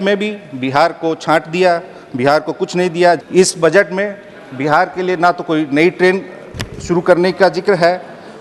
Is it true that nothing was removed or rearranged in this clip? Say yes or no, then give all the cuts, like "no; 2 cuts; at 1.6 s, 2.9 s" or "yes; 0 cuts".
no; 1 cut; at 3.2 s